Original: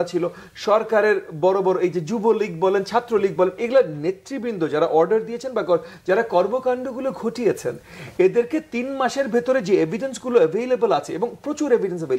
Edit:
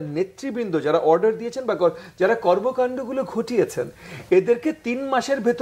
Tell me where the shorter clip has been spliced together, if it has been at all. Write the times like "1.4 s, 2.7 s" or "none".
none